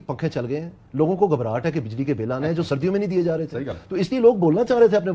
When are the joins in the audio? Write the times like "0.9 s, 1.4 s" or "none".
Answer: none